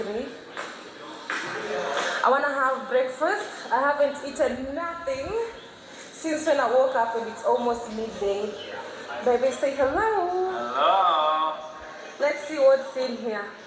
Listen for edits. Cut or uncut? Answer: uncut